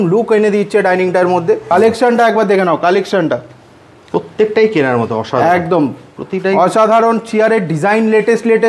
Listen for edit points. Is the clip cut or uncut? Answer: cut